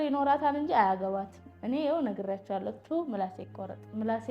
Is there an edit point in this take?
no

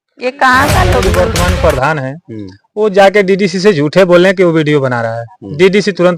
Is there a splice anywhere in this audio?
yes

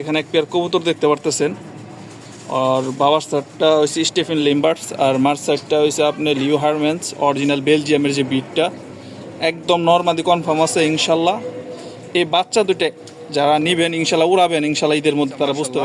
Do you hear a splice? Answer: no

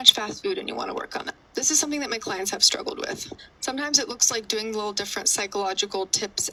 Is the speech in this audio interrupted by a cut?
no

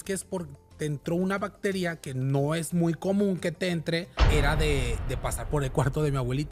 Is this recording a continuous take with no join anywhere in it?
no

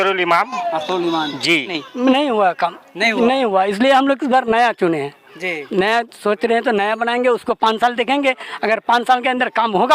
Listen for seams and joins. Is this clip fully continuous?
no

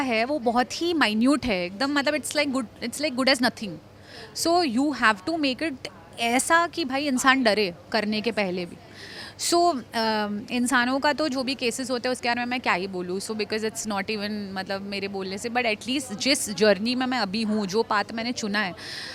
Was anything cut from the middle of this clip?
no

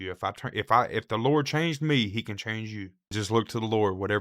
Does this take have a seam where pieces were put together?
yes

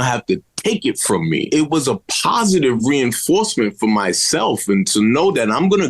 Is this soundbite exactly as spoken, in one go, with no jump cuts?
no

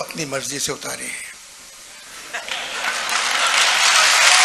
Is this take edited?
no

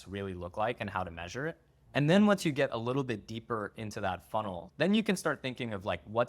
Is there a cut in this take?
yes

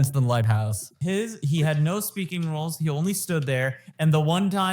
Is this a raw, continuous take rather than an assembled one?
no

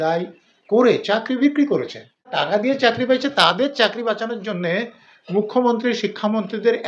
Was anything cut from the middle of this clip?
yes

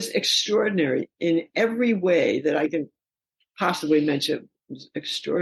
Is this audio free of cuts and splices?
no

